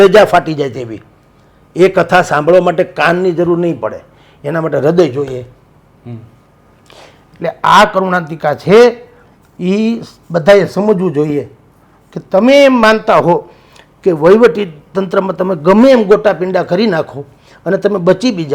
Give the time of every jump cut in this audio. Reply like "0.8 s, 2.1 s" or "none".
none